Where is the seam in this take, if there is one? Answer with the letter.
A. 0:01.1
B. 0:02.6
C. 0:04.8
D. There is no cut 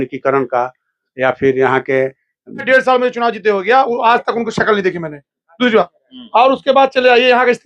B